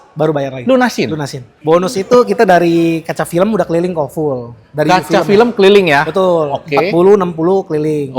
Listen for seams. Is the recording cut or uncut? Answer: cut